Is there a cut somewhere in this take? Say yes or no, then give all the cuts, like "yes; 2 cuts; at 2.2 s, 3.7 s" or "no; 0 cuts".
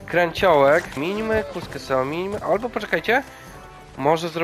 yes; 1 cut; at 1.0 s